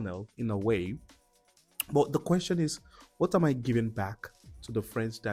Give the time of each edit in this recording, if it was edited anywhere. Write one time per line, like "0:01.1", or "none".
none